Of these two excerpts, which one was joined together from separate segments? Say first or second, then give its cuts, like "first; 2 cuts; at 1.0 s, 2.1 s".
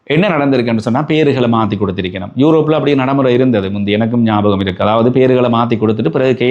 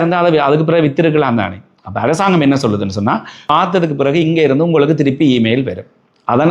second; 1 cut; at 3.3 s